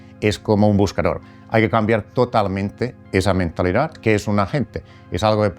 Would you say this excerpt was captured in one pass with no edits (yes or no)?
yes